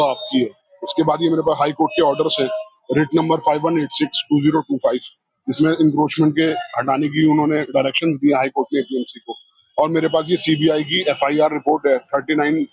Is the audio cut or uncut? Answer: uncut